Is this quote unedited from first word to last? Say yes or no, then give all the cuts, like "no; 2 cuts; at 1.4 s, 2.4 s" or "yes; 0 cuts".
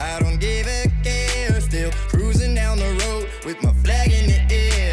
yes; 0 cuts